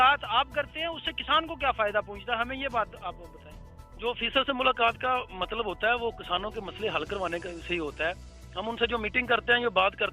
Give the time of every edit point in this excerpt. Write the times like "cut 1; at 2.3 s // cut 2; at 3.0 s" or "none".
none

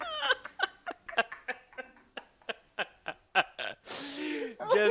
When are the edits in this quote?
none

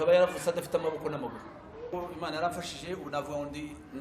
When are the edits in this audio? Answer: cut 1; at 1.9 s

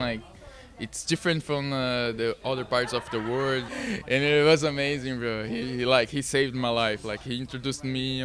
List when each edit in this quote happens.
cut 1; at 3.7 s

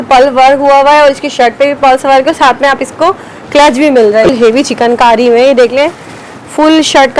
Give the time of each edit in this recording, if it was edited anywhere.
cut 1; at 4.3 s

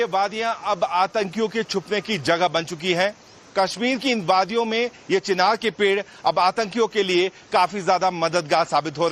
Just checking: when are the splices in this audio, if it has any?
none

